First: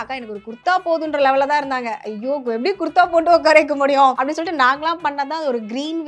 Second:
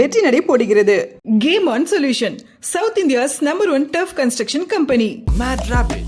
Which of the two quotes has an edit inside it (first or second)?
first